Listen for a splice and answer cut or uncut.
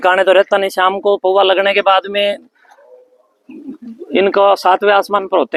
uncut